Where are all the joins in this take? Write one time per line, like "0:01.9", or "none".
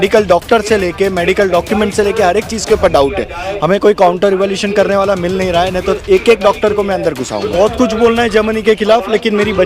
0:07.5